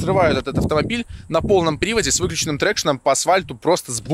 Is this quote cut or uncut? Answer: uncut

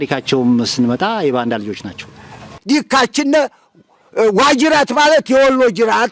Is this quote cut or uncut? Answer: cut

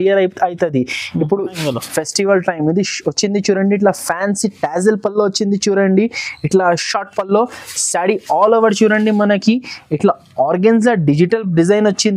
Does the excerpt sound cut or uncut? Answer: cut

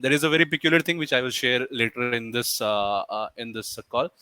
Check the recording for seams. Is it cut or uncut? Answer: uncut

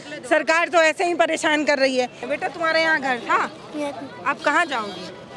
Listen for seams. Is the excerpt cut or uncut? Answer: cut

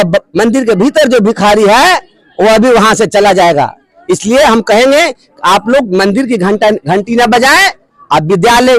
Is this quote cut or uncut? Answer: uncut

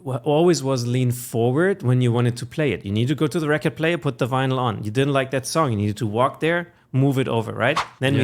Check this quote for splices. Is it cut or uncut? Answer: uncut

